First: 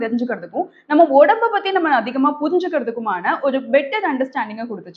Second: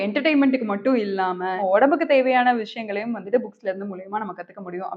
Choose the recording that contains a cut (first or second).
second